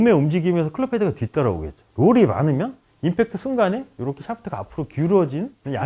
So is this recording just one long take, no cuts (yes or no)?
yes